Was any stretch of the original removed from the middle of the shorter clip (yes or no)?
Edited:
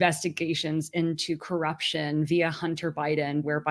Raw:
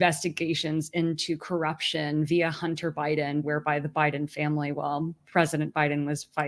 no